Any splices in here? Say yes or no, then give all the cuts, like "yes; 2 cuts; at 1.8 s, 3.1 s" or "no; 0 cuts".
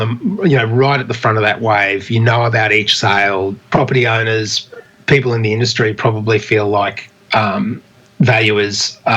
yes; 1 cut; at 3.6 s